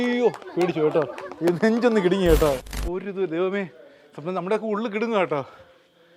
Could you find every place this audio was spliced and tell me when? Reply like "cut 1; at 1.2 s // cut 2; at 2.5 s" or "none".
cut 1; at 2.7 s